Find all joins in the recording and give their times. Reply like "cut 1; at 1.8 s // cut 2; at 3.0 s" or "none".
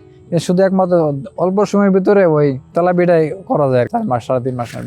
cut 1; at 2.7 s // cut 2; at 3.9 s

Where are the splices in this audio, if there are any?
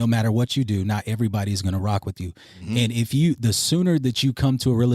none

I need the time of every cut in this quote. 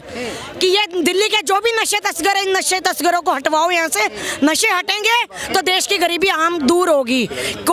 none

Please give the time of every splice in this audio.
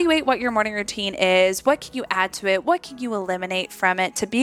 none

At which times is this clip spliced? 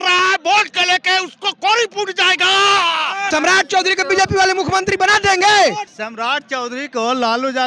cut 1; at 3.2 s // cut 2; at 5.9 s

